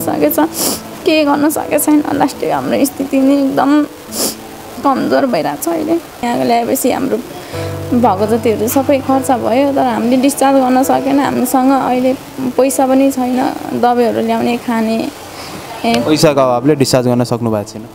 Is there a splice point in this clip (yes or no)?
yes